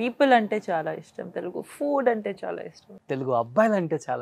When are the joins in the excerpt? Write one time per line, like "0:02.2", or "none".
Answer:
0:02.9